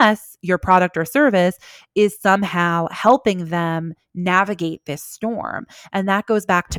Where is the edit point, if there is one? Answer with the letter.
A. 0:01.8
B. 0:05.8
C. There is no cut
C